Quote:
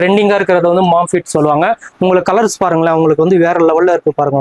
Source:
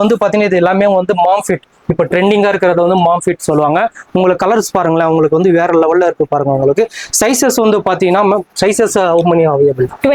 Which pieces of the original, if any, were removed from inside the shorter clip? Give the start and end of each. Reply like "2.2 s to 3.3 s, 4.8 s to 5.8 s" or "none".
none